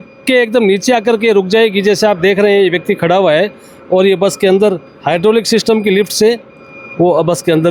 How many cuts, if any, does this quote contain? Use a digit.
0